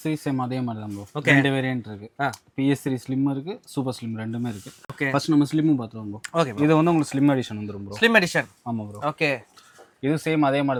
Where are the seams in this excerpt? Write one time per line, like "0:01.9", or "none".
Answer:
none